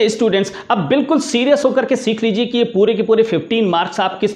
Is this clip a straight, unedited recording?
yes; 0 cuts

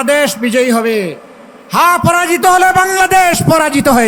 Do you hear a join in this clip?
no; 0 cuts

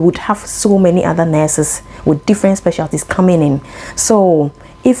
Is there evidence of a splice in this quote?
no; 0 cuts

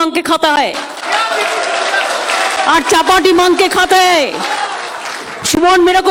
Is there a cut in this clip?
no; 0 cuts

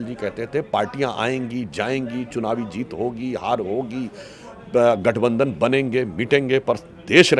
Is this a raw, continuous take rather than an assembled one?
yes; 0 cuts

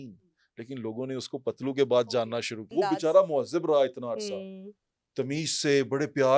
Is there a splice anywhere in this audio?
yes; 1 cut; at 2.7 s

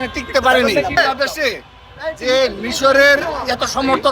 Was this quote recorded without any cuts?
no; 1 cut; at 1.0 s

